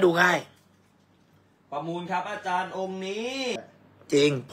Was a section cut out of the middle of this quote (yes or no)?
yes